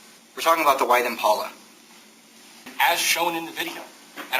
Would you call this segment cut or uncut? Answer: cut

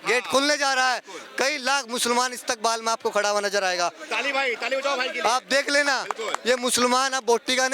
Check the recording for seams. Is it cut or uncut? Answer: uncut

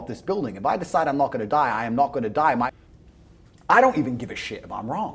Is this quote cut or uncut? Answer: cut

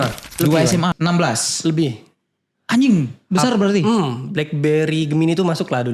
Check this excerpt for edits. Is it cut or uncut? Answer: cut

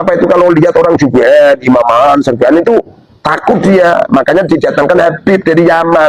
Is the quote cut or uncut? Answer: uncut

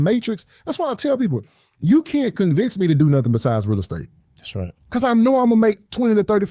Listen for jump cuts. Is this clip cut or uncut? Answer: uncut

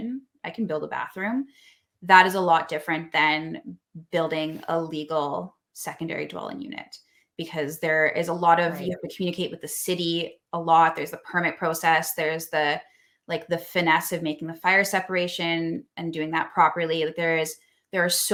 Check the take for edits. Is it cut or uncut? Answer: uncut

